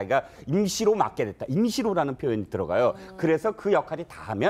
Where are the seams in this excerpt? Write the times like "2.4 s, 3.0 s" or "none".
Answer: 1.3 s